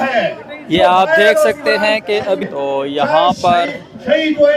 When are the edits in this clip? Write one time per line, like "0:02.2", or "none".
0:02.4